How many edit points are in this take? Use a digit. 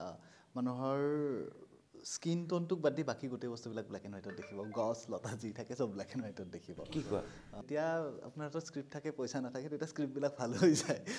1